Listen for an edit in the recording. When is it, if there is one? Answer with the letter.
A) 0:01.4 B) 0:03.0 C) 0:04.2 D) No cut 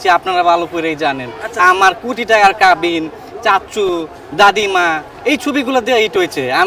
D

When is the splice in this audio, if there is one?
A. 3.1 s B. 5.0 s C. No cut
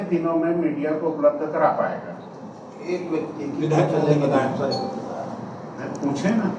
C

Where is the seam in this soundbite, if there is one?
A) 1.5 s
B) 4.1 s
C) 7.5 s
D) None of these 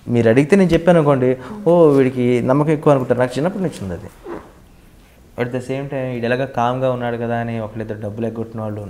B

